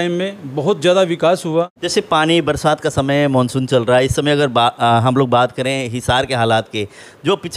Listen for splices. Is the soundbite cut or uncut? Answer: cut